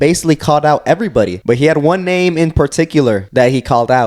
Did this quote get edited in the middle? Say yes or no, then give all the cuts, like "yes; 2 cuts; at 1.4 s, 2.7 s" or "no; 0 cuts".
yes; 2 cuts; at 1.4 s, 3.2 s